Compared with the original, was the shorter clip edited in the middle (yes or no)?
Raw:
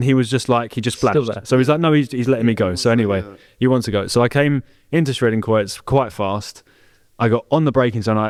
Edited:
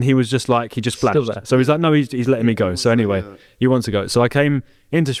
no